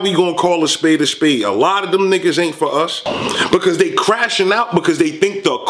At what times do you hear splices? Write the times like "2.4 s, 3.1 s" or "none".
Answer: 3.1 s